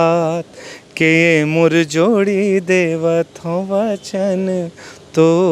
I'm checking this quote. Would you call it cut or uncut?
uncut